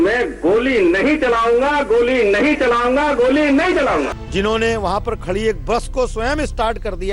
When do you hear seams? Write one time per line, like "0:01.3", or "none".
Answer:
0:04.2